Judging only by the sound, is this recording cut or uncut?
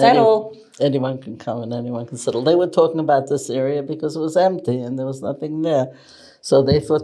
uncut